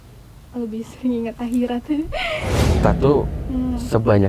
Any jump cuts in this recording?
yes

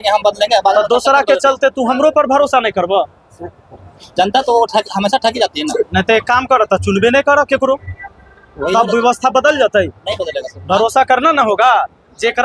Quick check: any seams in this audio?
no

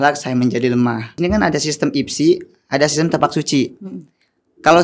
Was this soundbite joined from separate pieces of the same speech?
yes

